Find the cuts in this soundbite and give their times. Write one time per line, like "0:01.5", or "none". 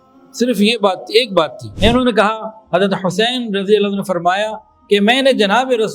0:01.6

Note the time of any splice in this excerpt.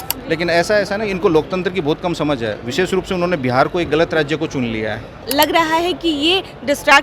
0:05.3

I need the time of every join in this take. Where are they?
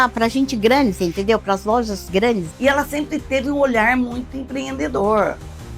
0:02.5

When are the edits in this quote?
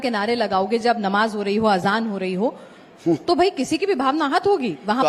none

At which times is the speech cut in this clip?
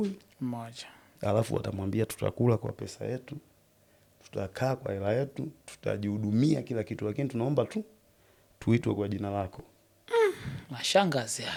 none

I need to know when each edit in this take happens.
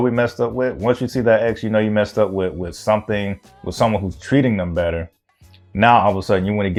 none

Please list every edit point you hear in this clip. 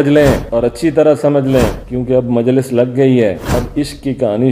none

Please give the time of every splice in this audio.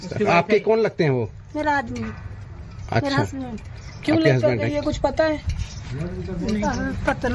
0:05.2

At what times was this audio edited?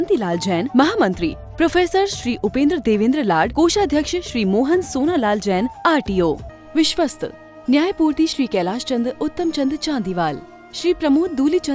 0:06.5

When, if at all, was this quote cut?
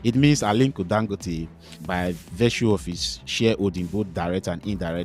0:01.8

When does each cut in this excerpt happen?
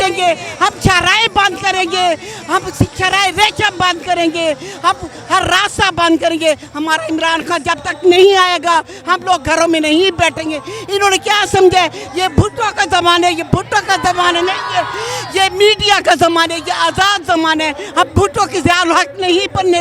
none

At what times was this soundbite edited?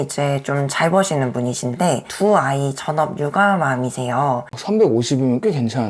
0:04.5

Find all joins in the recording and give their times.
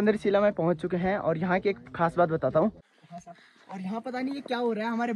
0:02.9

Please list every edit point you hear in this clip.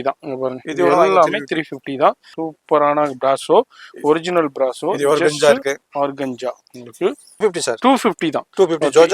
0:02.3
0:07.4

